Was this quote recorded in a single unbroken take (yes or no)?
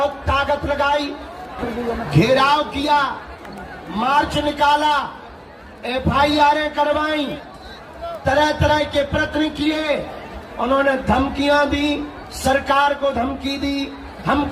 no